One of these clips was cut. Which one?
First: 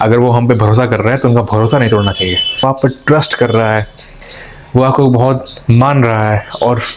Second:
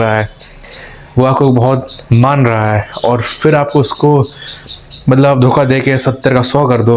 first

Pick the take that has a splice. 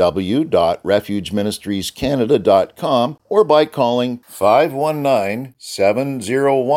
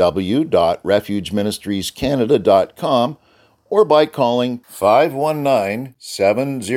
first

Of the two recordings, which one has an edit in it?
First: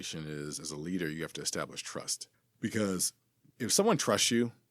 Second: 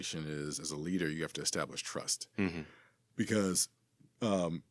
first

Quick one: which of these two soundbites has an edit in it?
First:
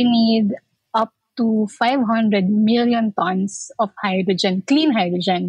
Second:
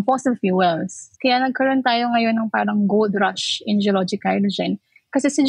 second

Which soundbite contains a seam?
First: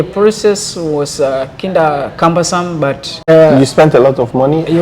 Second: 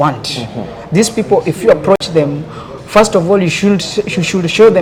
first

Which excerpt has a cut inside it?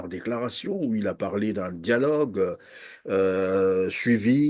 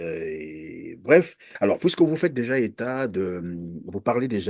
second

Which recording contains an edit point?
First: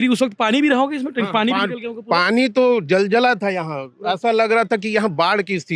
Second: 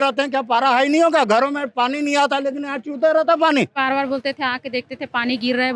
second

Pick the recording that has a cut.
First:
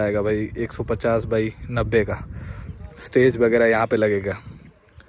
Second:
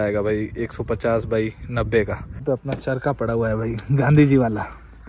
second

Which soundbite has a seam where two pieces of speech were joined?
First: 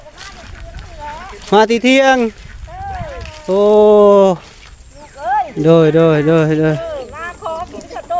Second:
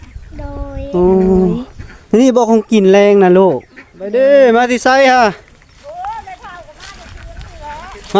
second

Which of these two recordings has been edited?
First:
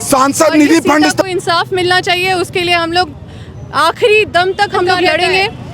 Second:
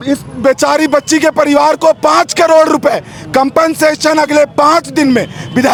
first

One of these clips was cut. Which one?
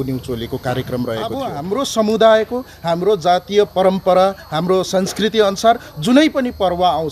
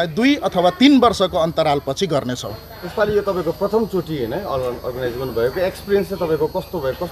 first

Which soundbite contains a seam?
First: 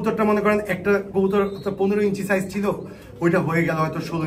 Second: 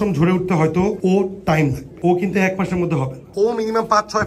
second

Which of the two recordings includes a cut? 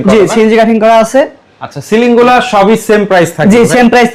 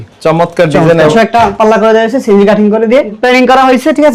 second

